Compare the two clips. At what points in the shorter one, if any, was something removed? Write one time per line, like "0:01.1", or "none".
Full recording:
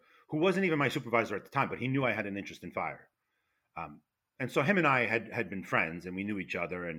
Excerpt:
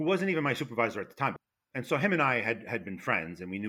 0:01.4